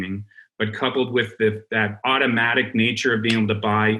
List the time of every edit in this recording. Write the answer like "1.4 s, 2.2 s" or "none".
2.0 s